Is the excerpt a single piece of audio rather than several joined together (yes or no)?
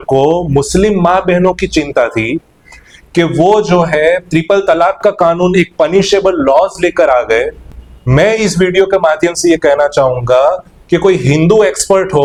yes